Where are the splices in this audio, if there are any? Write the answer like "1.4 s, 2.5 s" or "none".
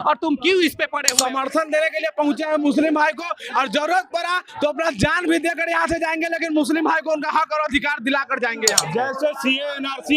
1.0 s, 8.8 s